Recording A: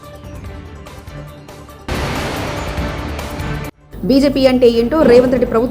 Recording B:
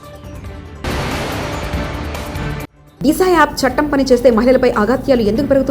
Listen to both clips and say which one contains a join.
B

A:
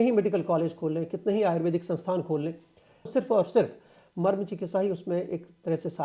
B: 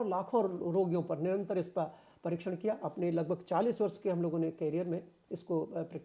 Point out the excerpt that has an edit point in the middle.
A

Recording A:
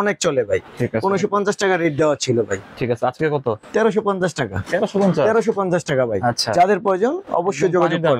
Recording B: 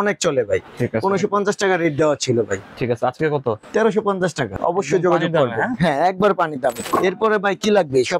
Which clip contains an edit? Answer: B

